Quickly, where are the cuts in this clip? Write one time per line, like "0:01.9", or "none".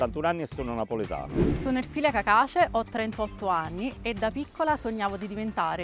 0:01.4